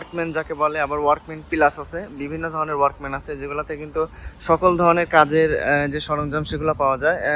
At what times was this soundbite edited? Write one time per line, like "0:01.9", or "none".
none